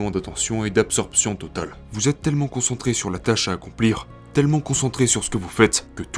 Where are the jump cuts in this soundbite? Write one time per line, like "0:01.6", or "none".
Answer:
0:01.8
0:04.1